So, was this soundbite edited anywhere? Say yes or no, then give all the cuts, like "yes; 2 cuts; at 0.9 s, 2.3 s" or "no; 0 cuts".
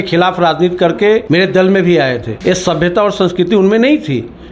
yes; 2 cuts; at 1.2 s, 2.3 s